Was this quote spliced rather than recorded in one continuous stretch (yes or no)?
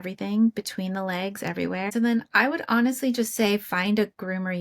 yes